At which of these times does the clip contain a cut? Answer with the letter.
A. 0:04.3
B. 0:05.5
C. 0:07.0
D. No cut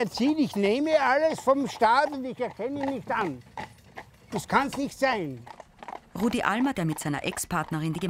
D